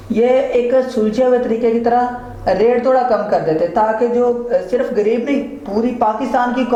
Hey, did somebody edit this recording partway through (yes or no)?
no